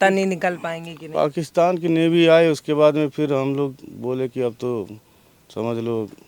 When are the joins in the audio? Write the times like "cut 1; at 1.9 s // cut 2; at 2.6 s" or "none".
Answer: none